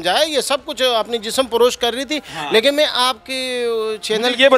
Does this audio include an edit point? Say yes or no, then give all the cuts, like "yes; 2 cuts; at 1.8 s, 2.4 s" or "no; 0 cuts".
no; 0 cuts